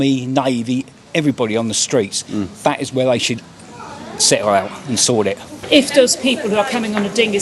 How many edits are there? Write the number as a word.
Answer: one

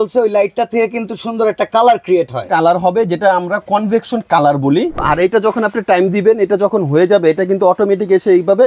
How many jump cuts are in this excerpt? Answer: one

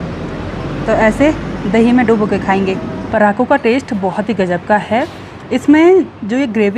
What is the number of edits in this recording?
one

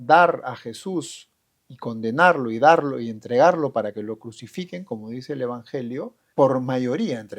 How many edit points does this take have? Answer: one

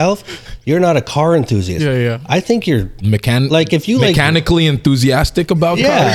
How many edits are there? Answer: one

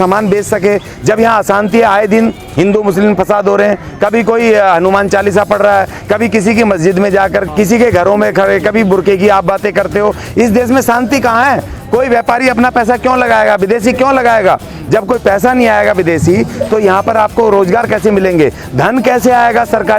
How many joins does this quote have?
one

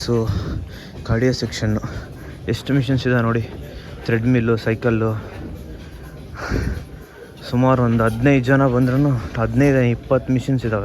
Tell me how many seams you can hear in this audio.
zero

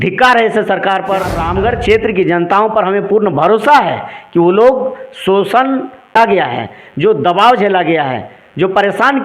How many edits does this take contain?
two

